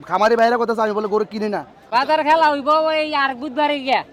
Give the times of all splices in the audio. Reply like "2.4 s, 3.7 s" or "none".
1.7 s